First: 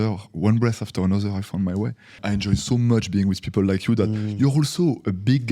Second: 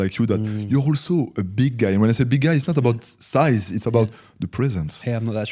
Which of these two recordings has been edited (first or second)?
first